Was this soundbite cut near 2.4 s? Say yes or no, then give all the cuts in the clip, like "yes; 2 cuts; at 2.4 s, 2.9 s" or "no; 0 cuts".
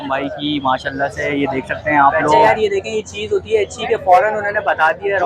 yes; 1 cut; at 2.4 s